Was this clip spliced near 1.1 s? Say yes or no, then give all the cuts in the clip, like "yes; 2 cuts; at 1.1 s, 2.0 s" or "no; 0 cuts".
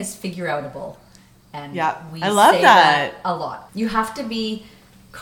no; 1 cut; at 3.6 s